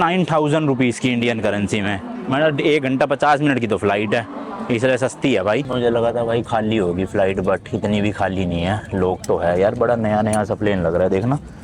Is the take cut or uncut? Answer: cut